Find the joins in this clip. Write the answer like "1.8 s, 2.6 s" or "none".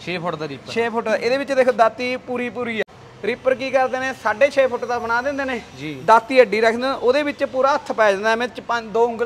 2.8 s